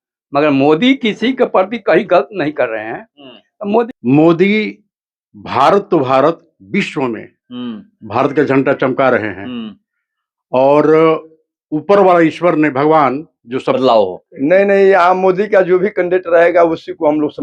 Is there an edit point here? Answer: yes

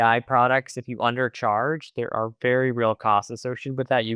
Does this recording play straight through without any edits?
yes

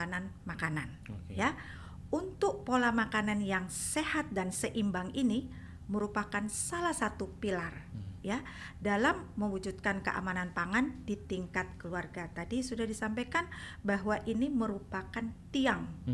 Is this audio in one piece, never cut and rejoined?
yes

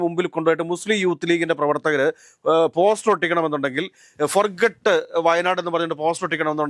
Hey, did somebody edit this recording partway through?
no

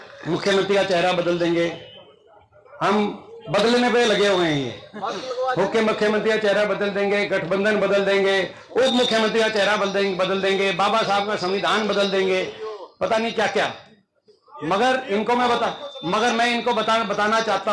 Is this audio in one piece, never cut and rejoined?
yes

